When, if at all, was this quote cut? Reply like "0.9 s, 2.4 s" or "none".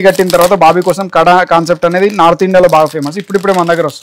none